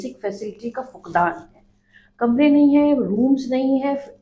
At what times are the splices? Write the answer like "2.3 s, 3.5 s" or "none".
none